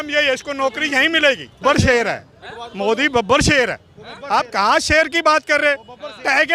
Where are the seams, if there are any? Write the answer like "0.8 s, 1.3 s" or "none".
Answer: 1.6 s